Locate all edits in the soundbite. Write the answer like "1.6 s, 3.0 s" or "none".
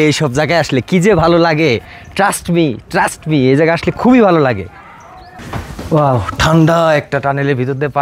5.4 s